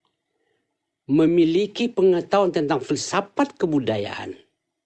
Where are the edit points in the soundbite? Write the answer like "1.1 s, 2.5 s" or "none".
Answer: none